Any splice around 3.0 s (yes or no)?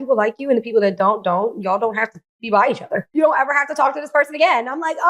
yes